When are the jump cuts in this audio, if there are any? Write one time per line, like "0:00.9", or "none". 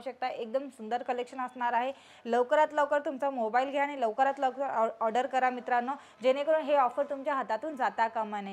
none